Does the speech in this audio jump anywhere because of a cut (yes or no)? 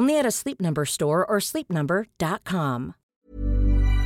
yes